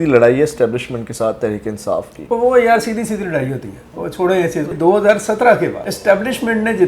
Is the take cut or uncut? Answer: cut